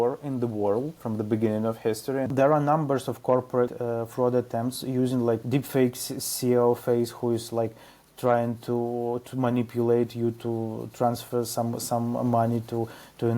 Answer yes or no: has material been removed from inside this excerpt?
yes